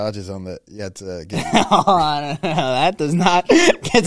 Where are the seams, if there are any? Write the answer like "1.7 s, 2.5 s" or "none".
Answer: none